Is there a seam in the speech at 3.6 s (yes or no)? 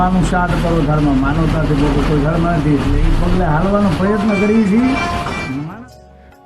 no